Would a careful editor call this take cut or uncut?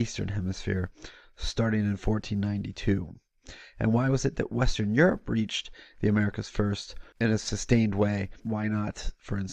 cut